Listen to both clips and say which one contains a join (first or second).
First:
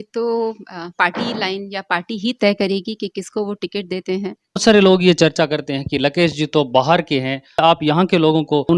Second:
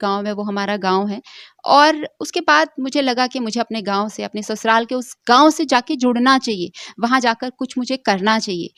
first